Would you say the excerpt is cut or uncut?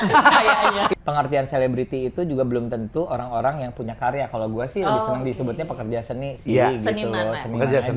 cut